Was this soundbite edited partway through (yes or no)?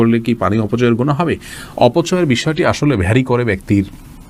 no